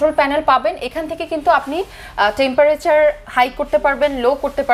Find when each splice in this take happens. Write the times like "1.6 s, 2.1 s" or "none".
none